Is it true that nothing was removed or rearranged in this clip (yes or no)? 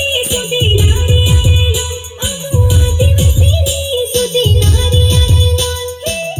yes